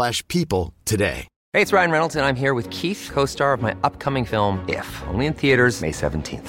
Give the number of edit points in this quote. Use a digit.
1